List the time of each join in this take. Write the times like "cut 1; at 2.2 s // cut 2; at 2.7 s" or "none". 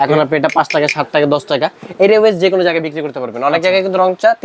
none